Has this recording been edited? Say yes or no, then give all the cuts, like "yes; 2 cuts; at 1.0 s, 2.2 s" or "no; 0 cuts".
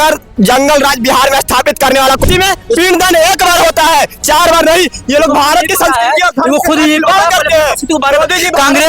yes; 1 cut; at 2.2 s